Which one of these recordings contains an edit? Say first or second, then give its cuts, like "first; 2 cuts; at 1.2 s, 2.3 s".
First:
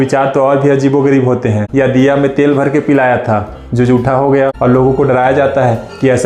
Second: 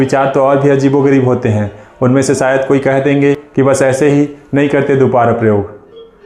first; 2 cuts; at 1.6 s, 4.6 s